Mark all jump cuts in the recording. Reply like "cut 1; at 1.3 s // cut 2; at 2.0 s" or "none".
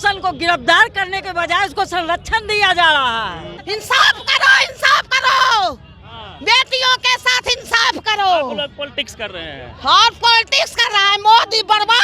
cut 1; at 3.5 s